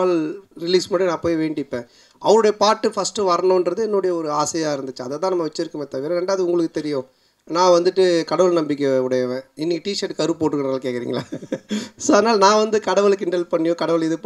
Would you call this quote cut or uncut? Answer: uncut